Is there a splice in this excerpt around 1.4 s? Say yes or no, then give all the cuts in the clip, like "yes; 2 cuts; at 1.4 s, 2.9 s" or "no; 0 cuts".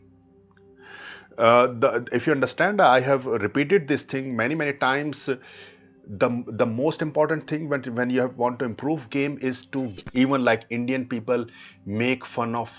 no; 1 cut; at 10.0 s